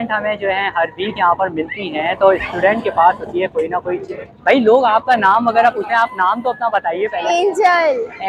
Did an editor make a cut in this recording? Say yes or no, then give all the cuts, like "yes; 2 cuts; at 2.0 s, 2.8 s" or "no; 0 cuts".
no; 0 cuts